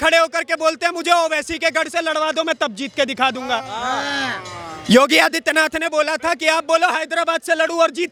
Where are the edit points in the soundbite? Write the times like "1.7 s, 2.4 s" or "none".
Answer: none